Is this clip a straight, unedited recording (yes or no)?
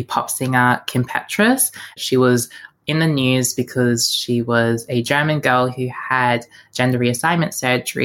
no